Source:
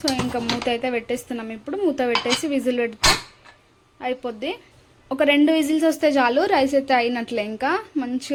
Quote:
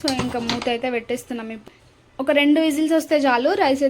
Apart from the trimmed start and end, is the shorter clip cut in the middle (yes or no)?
yes